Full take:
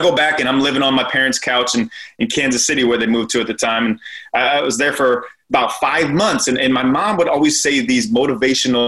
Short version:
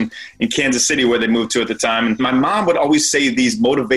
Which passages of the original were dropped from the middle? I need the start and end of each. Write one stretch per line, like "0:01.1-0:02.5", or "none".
0:04.0-0:06.7

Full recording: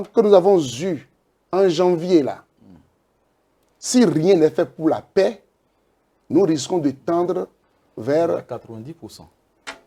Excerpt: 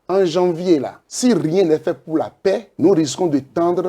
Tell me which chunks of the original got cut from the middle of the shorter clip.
0:02.4-0:03.7
0:05.4-0:06.2

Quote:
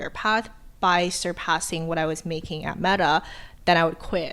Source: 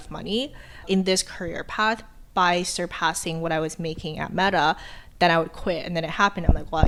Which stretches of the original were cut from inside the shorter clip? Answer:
none

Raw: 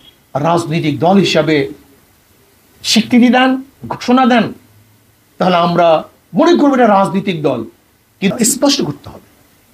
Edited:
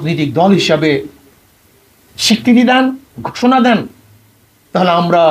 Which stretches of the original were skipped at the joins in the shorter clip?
none

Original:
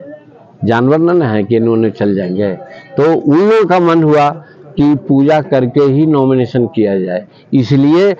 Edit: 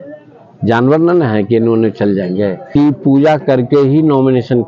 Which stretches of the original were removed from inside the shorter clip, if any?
0:02.6-0:04.6

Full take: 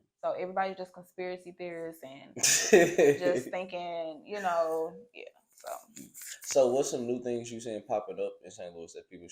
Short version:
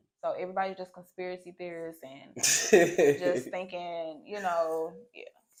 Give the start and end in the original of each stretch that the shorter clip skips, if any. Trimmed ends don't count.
none

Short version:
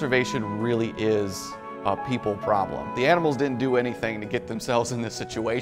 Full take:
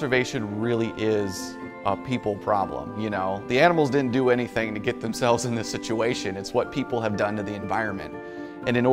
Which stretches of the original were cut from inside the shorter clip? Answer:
0:02.9-0:03.4

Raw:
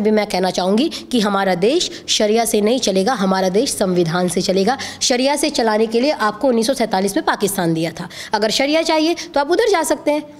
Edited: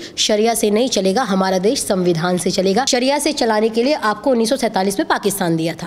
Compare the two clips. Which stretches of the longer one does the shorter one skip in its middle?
0:04.8-0:05.0

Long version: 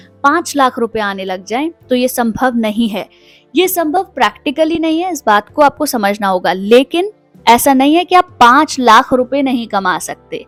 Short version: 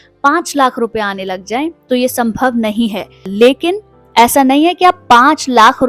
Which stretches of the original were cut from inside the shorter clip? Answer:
0:03.3-0:06.6

